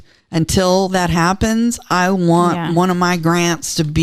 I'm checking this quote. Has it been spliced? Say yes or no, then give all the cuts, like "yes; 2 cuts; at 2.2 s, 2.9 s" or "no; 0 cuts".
no; 0 cuts